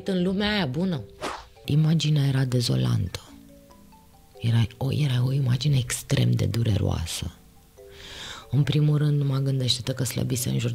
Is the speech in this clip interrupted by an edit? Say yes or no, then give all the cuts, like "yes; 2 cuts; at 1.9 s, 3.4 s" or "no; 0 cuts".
yes; 1 cut; at 1.6 s